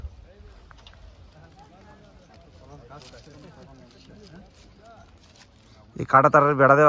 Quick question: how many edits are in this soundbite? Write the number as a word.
zero